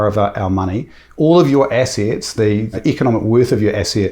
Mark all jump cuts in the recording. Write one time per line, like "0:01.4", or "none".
0:02.8